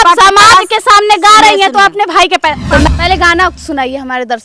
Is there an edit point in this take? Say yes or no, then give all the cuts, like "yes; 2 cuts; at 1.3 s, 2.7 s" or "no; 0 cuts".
yes; 1 cut; at 2.9 s